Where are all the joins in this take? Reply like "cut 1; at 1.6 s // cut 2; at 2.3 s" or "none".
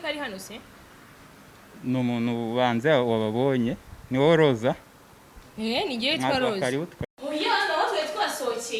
cut 1; at 7.1 s

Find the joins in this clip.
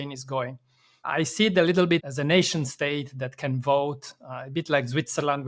cut 1; at 1.0 s // cut 2; at 2.0 s

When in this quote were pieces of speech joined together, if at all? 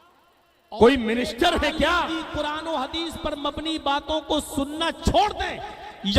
cut 1; at 2.1 s

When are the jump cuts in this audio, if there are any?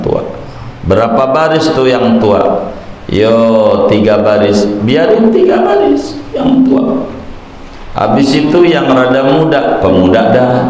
none

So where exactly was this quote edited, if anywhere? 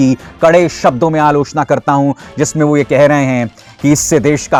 none

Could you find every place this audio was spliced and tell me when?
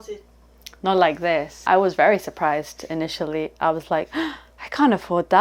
cut 1; at 1.7 s

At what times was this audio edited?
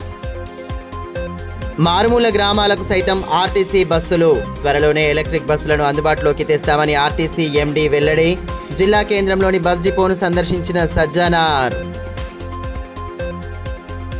cut 1; at 1.4 s

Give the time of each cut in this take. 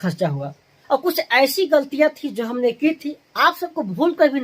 none

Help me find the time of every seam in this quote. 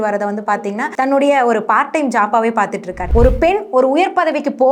cut 1; at 0.9 s // cut 2; at 3.0 s

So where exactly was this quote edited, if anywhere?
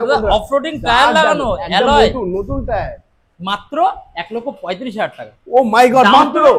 none

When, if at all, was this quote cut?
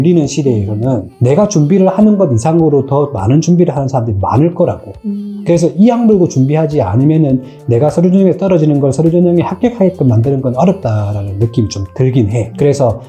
none

